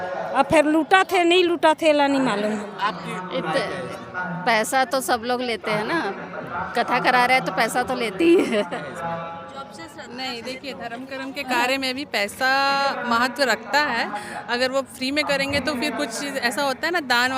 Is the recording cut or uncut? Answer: cut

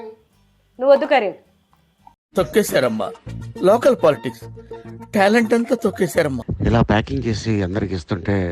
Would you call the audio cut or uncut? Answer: cut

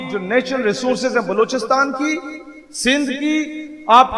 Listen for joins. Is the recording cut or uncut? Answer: uncut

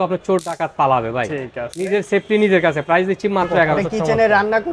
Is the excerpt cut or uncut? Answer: cut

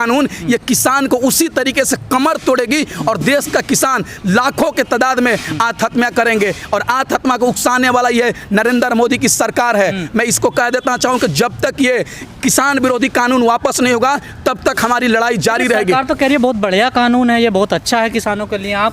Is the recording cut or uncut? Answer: uncut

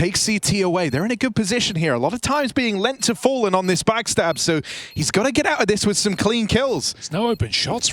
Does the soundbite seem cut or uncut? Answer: cut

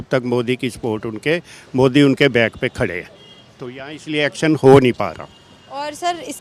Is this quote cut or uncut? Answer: uncut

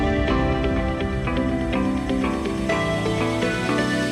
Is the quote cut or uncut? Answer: uncut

